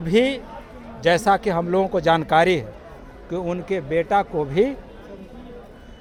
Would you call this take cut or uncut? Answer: uncut